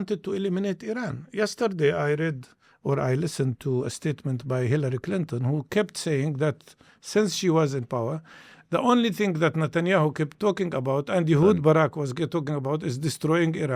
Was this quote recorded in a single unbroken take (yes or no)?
yes